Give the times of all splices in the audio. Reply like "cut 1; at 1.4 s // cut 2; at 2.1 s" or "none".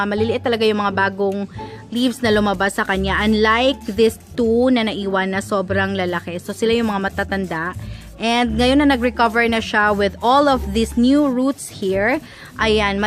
none

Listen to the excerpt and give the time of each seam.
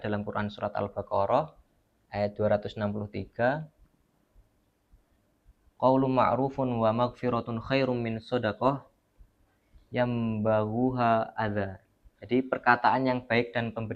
none

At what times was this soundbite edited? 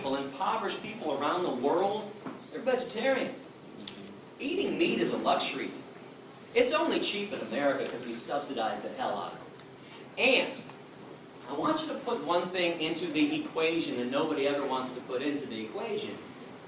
cut 1; at 6.1 s

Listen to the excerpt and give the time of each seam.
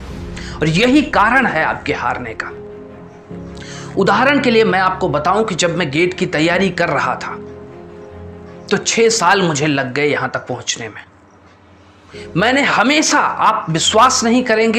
none

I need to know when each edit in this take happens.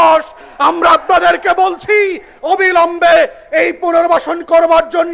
none

